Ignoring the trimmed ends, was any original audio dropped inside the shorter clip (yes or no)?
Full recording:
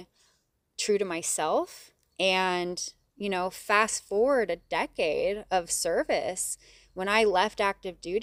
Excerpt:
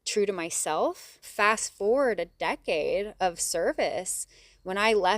yes